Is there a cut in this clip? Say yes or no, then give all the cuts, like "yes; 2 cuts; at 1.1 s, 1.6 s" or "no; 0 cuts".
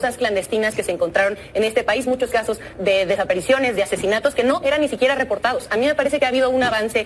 no; 0 cuts